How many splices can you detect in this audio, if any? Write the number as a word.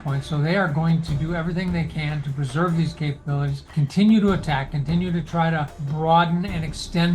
two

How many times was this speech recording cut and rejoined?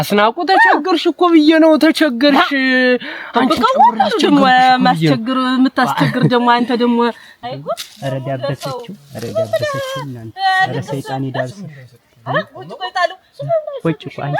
one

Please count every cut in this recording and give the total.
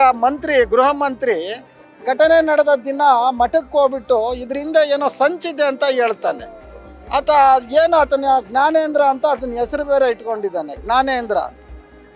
zero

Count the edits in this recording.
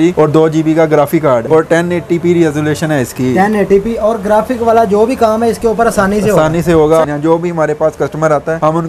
two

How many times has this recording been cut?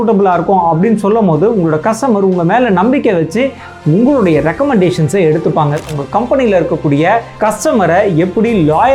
one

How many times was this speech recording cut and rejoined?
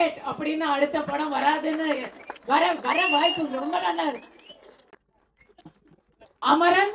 zero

